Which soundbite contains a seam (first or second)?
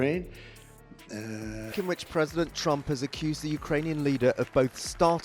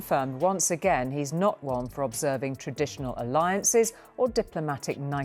first